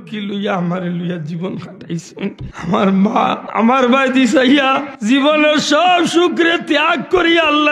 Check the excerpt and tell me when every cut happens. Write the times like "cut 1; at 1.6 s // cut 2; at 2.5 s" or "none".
cut 1; at 2.5 s // cut 2; at 3.4 s // cut 3; at 4.9 s